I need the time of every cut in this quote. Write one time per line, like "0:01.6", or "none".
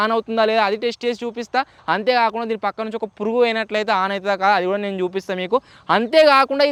none